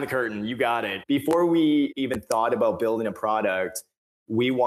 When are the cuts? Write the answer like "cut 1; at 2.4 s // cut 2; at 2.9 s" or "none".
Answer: cut 1; at 0.9 s // cut 2; at 1.9 s